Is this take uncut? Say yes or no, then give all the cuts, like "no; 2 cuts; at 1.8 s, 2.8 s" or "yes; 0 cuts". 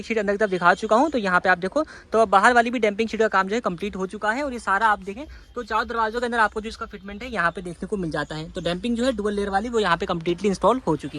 yes; 0 cuts